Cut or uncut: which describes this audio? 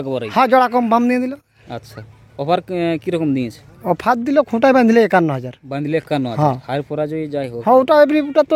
uncut